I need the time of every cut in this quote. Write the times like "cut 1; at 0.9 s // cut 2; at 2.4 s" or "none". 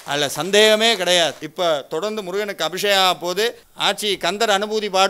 cut 1; at 1.4 s